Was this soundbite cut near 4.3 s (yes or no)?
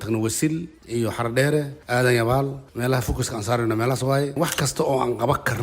yes